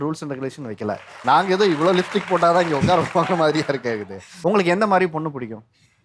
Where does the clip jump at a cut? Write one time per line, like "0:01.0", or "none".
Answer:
0:04.3